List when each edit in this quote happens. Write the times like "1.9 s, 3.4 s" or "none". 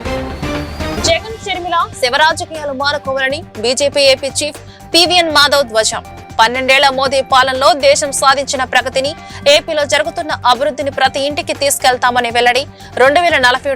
0.9 s